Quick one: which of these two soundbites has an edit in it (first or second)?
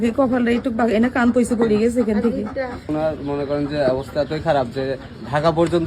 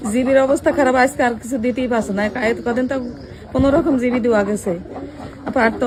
first